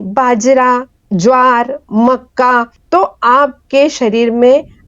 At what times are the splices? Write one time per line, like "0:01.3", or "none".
0:00.9
0:02.8